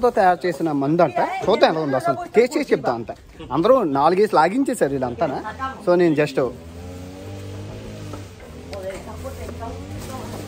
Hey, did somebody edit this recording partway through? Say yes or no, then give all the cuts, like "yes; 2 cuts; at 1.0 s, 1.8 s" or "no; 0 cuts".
no; 0 cuts